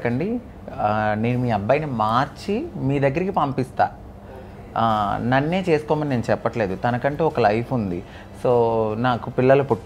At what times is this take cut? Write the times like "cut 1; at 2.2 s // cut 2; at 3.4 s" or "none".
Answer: none